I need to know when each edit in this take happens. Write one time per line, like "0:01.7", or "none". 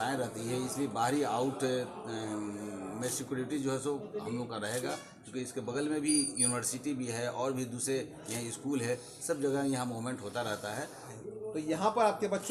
0:11.1